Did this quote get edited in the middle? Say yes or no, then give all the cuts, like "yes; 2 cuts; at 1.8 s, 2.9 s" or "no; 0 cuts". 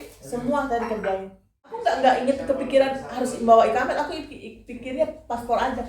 yes; 1 cut; at 1.8 s